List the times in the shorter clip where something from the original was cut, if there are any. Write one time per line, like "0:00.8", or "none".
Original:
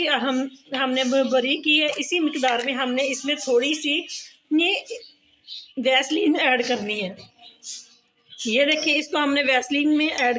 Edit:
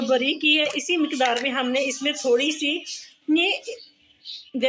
none